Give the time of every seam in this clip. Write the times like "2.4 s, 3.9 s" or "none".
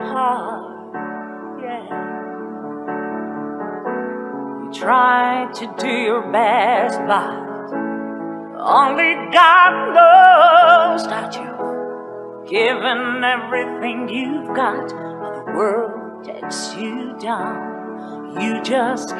none